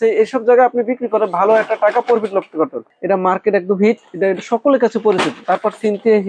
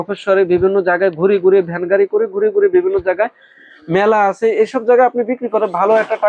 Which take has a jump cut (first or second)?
first